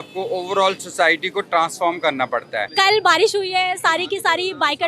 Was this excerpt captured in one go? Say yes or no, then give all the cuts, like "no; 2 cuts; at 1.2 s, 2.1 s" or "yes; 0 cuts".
no; 1 cut; at 2.7 s